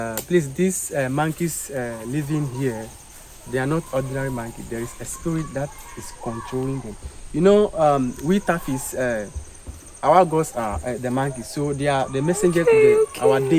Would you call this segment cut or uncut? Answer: uncut